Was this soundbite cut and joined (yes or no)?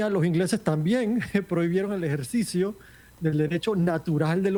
no